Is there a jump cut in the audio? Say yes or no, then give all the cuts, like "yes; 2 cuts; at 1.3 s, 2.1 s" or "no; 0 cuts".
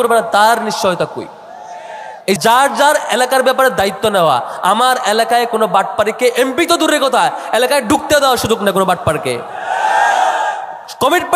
yes; 1 cut; at 2.4 s